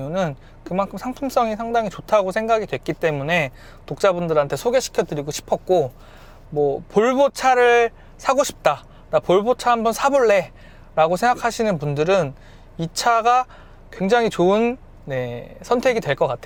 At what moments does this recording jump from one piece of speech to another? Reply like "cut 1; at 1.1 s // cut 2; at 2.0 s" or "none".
none